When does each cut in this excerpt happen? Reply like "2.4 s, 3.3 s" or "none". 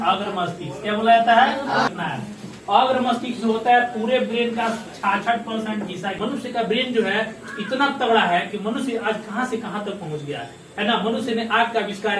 1.9 s, 6.2 s